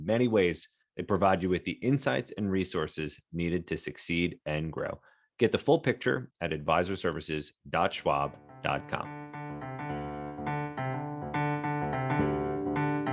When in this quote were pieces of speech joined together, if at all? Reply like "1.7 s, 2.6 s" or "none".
9.1 s